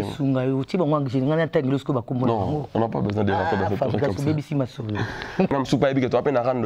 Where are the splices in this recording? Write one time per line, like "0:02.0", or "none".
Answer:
0:05.5